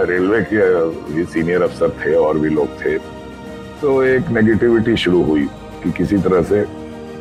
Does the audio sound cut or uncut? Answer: uncut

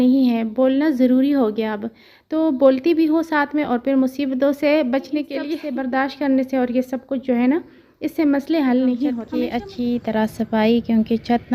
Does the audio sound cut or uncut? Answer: cut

